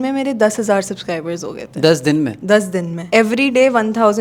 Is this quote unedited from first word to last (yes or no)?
yes